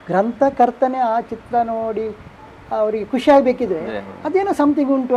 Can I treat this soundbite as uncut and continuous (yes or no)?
yes